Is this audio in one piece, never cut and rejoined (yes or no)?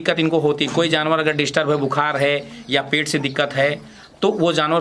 yes